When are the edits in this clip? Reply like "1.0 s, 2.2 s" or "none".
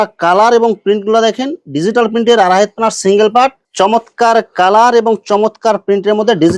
3.6 s